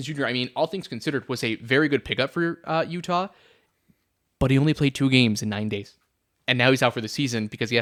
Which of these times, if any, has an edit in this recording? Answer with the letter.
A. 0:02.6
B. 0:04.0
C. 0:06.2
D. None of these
D